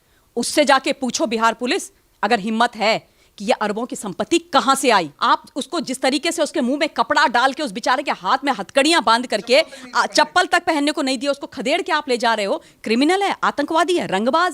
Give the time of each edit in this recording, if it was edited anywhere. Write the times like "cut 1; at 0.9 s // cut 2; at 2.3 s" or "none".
cut 1; at 5.1 s

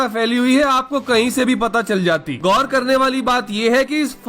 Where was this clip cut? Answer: none

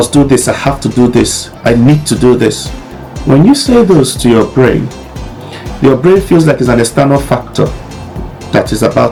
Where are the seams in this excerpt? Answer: none

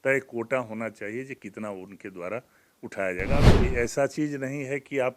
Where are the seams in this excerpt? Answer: cut 1; at 3.5 s

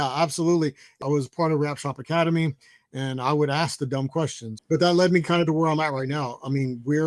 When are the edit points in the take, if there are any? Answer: cut 1; at 0.9 s // cut 2; at 4.5 s

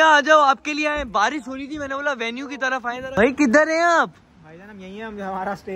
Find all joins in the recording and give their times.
none

